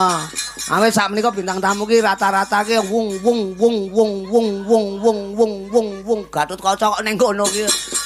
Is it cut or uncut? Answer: uncut